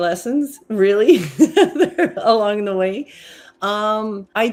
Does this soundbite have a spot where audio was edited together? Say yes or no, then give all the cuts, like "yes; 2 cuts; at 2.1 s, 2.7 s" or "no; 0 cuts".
no; 0 cuts